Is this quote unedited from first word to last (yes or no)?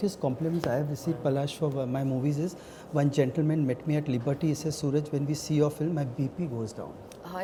yes